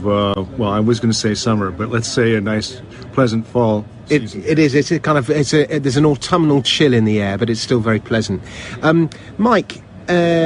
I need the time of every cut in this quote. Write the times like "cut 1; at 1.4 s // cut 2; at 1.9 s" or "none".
cut 1; at 8.7 s